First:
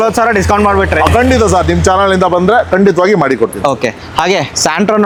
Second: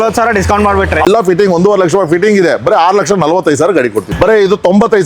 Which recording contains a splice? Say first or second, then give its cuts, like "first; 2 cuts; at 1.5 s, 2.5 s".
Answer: second; 2 cuts; at 1.1 s, 4.1 s